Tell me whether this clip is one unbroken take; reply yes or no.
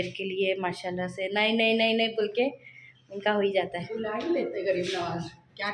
yes